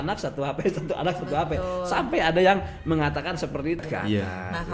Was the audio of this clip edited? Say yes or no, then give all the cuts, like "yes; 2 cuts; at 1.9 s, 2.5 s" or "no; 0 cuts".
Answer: yes; 1 cut; at 3.8 s